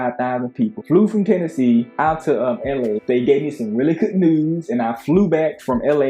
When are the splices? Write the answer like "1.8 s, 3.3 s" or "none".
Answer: 3.0 s

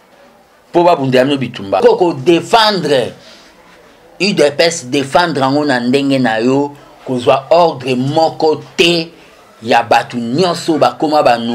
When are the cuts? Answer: 1.8 s

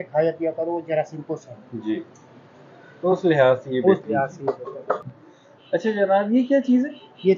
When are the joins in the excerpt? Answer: none

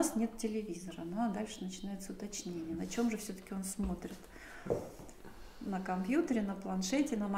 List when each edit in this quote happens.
none

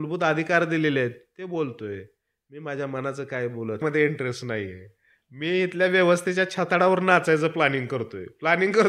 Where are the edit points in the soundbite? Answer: 3.8 s

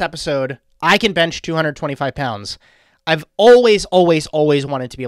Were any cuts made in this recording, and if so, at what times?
none

